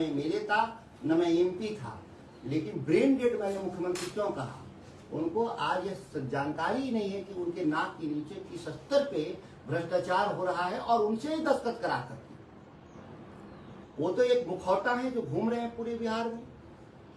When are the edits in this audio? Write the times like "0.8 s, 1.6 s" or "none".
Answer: none